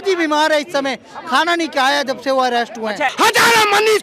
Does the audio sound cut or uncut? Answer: cut